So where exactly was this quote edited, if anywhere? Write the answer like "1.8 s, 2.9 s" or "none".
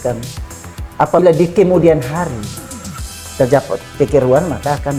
none